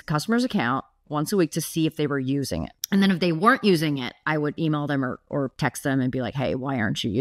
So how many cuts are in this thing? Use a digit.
0